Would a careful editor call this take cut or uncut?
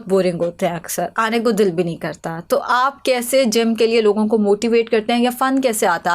uncut